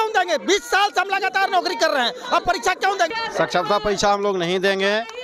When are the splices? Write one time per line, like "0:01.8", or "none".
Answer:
0:03.1